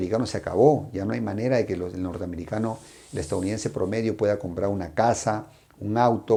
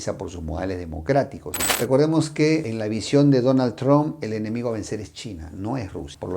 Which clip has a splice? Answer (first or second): second